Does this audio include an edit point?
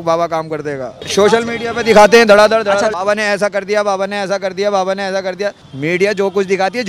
yes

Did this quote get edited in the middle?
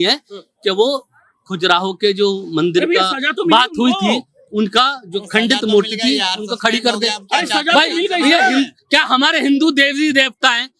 no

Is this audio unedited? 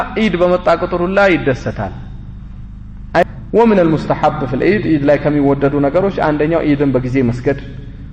no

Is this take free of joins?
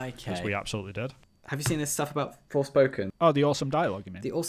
no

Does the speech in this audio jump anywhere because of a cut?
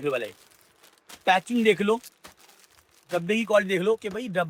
no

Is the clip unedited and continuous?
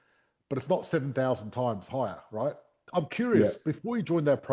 no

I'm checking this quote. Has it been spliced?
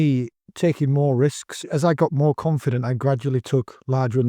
yes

